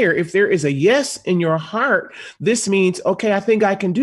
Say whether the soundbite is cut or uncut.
uncut